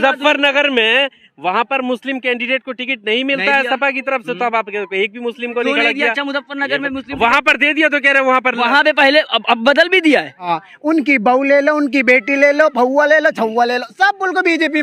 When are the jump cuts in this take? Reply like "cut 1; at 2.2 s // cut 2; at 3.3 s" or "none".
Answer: cut 1; at 10.5 s

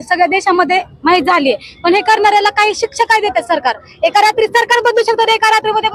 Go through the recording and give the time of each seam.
none

